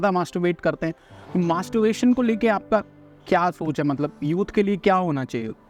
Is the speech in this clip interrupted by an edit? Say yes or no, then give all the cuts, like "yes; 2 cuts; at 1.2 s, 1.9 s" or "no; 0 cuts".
no; 0 cuts